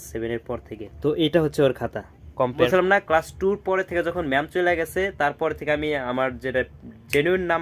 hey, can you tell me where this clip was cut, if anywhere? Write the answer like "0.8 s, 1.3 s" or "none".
2.7 s